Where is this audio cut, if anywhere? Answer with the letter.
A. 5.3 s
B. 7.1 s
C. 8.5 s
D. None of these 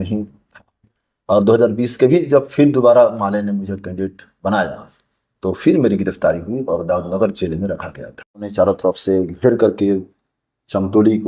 C